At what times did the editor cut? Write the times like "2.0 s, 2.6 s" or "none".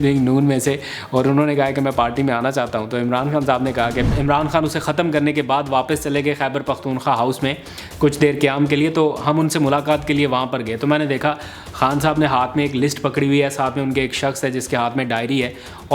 4.1 s